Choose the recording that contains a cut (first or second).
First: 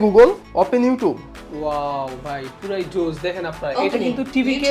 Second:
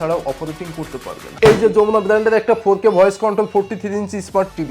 second